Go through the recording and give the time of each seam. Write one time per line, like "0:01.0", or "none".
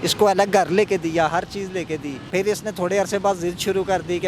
0:02.2